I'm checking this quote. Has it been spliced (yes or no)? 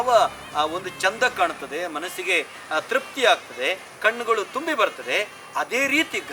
no